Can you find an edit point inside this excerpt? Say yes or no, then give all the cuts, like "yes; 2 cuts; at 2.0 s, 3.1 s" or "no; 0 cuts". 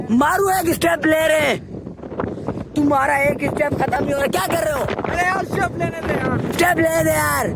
no; 0 cuts